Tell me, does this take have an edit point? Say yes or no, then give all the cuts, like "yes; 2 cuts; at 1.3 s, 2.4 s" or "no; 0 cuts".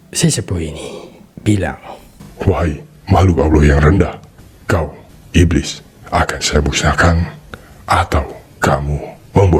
no; 0 cuts